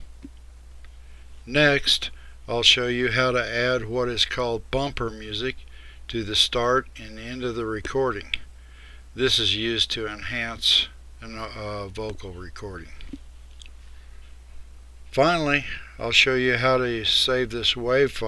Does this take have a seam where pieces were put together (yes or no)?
no